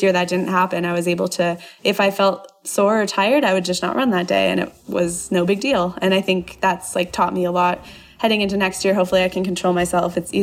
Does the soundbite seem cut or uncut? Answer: uncut